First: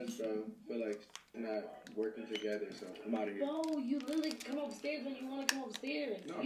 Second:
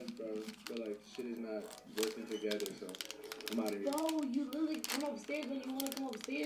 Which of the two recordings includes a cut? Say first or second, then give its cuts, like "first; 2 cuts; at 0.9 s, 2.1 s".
first; 1 cut; at 2.9 s